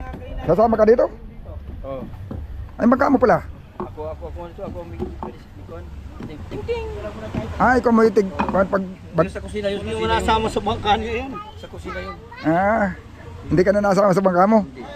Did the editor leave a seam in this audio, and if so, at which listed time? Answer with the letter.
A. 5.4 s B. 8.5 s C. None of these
C